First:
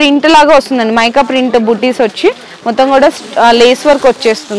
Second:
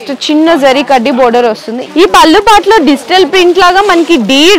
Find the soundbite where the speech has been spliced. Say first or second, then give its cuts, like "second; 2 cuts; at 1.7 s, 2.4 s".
second; 1 cut; at 1.7 s